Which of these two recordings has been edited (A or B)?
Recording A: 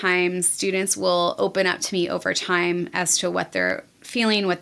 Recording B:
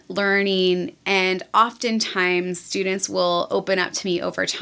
B